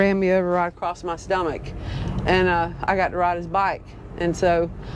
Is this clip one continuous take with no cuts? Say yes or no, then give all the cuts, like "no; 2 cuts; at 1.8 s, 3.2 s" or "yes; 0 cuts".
yes; 0 cuts